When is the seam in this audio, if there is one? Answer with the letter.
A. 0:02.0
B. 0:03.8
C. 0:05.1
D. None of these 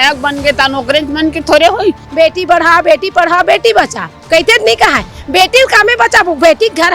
A